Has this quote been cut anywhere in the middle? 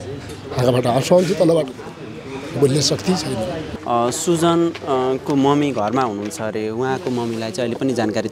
yes; 1 cut; at 3.7 s

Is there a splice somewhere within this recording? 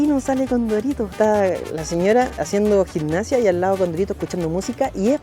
yes; 2 cuts; at 1.1 s, 2.4 s

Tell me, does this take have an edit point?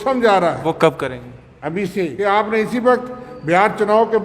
yes; 1 cut; at 2.1 s

